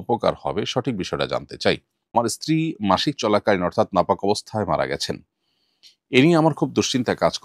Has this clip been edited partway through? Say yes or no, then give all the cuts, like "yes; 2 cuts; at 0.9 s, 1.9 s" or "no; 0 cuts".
yes; 1 cut; at 2.1 s